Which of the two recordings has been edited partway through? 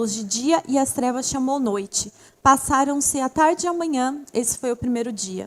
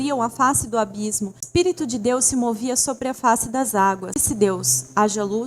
second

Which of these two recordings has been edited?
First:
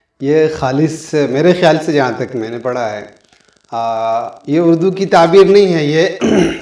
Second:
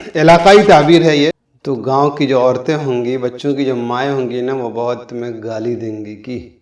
second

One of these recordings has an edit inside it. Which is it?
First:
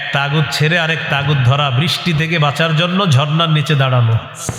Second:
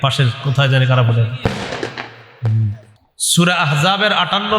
second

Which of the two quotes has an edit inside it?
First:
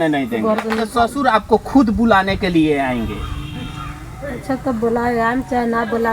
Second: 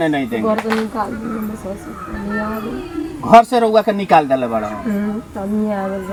first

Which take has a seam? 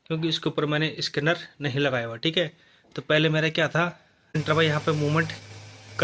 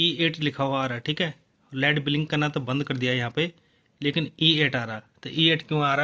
first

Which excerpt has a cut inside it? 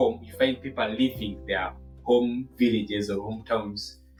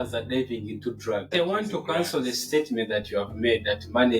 second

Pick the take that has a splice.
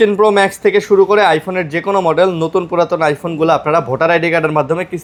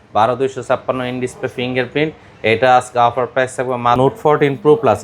second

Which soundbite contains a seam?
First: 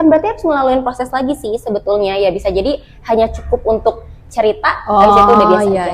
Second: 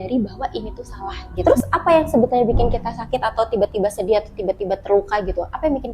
second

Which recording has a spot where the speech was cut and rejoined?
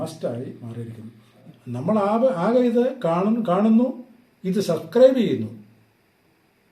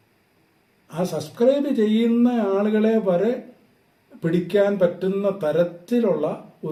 first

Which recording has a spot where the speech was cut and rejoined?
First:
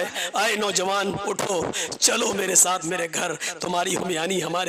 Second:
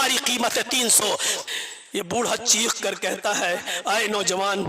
second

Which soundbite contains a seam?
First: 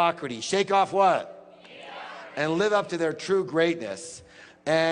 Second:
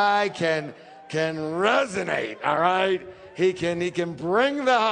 first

